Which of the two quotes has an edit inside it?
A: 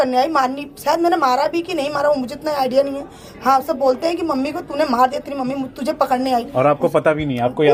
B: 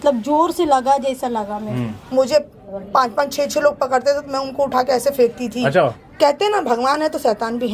B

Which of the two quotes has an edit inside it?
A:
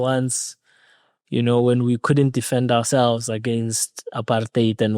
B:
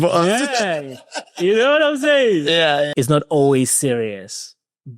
B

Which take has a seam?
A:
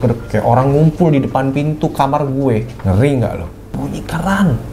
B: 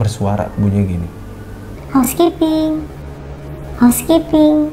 A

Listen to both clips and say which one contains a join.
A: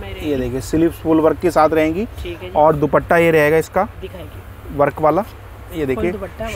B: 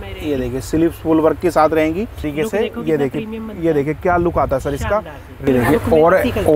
B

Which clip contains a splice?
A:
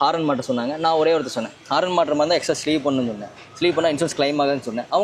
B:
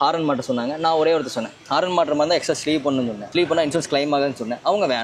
B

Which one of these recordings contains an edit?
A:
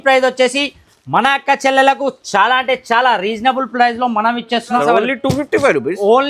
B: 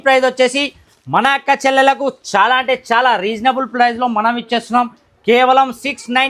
A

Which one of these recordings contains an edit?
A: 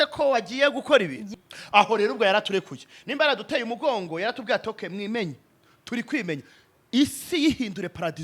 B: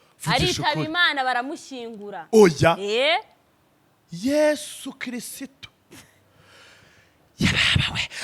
A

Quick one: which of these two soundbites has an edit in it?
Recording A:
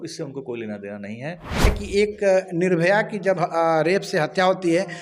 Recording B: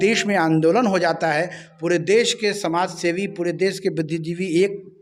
A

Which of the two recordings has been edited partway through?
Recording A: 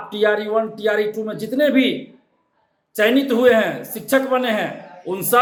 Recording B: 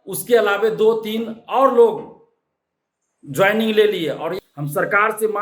B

